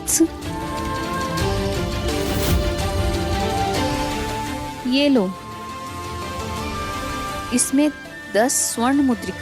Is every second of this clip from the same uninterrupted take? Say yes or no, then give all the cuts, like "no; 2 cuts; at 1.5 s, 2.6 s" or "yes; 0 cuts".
no; 3 cuts; at 1.0 s, 3.4 s, 7.3 s